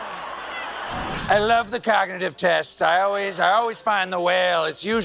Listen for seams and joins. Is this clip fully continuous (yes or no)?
no